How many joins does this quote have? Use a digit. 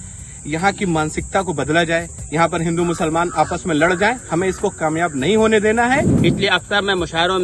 1